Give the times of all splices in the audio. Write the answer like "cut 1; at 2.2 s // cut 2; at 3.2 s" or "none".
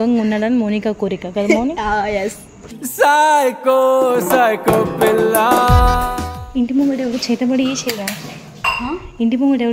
cut 1; at 6.3 s